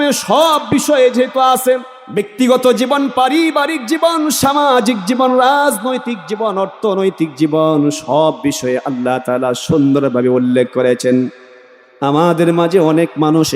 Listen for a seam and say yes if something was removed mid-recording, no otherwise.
yes